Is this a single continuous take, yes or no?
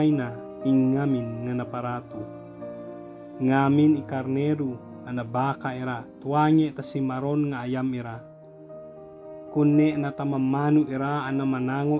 no